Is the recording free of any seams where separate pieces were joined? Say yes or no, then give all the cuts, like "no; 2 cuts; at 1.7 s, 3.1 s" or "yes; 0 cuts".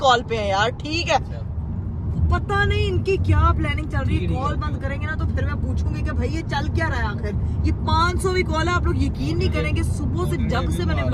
yes; 0 cuts